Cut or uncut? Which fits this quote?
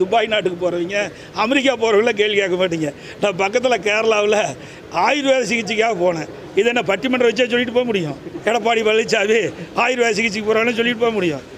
cut